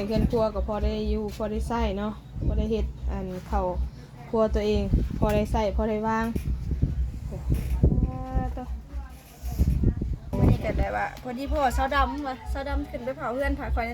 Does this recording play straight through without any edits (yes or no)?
no